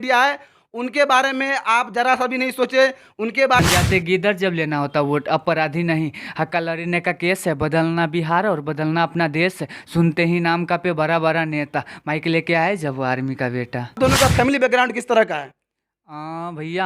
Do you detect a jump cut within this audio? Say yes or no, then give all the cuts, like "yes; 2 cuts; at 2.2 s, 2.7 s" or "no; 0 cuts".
yes; 2 cuts; at 3.6 s, 14.0 s